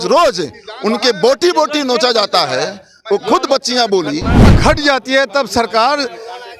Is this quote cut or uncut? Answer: cut